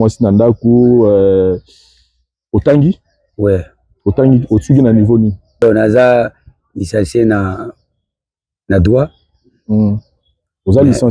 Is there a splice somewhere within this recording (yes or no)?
yes